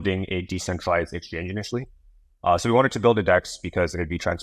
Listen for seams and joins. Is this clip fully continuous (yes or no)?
yes